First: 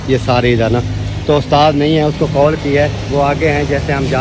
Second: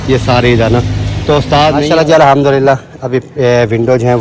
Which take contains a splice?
second; 1 cut; at 1.9 s

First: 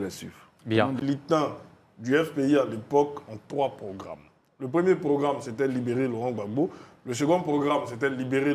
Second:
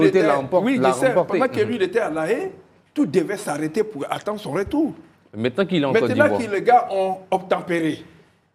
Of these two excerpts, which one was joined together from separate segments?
first; 1 cut; at 1.0 s

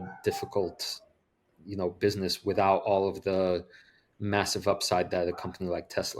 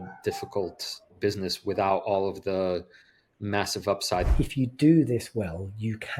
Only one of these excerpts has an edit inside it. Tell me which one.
second; 2 cuts; at 1.2 s, 4.3 s

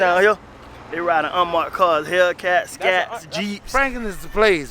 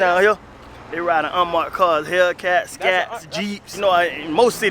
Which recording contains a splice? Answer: first; 1 cut; at 3.6 s

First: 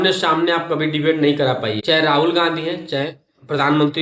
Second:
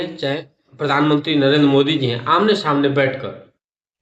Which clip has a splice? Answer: first; 1 cut; at 1.8 s

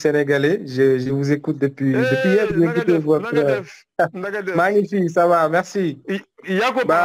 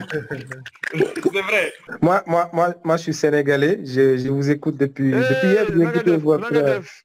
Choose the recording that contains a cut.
second; 1 cut; at 1.8 s

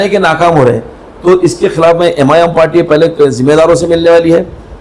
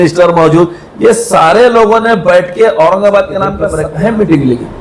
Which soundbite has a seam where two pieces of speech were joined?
second; 1 cut; at 3.7 s

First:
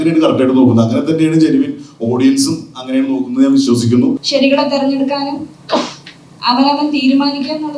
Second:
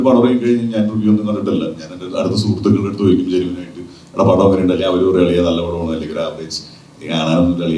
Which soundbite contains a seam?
first; 1 cut; at 4.2 s

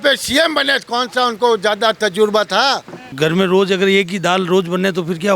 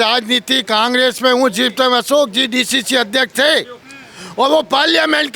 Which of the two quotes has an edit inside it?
first; 1 cut; at 3.0 s

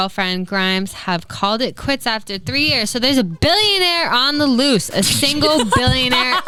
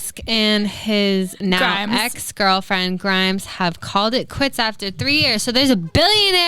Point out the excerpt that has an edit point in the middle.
second; 1 cut; at 1.3 s

